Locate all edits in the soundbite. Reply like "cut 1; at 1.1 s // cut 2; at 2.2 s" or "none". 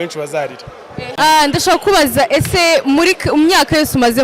cut 1; at 1.0 s